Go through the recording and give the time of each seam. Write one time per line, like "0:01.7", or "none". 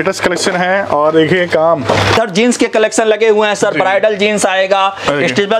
0:02.2